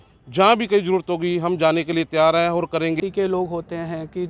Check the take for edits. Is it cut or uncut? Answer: cut